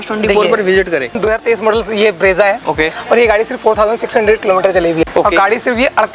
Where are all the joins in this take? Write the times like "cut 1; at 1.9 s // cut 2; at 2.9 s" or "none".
cut 1; at 1.1 s // cut 2; at 5.0 s